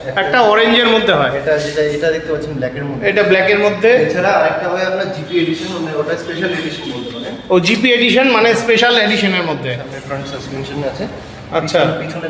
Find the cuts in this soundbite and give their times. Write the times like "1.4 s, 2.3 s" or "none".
10.0 s